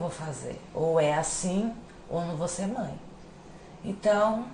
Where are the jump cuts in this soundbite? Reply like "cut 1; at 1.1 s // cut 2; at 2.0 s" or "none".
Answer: none